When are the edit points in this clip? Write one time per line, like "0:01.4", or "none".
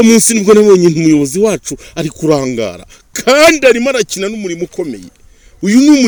none